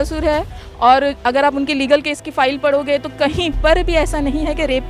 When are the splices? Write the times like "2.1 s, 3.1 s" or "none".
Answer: none